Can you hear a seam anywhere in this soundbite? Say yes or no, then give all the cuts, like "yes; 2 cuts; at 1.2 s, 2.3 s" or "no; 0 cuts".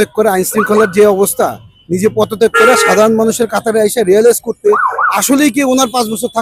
no; 0 cuts